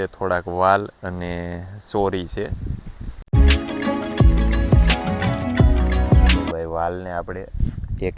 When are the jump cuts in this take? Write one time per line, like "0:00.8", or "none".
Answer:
0:03.4